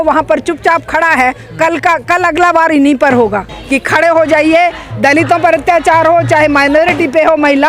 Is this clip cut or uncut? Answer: cut